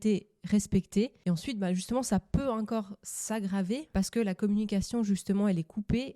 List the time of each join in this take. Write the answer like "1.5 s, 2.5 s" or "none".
1.2 s, 3.9 s